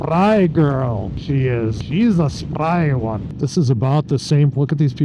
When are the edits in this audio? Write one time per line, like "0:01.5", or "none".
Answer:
0:01.4
0:03.3